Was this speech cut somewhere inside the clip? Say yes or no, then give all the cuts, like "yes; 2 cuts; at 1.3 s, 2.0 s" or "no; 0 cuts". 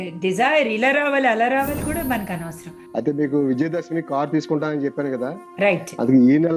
yes; 1 cut; at 2.7 s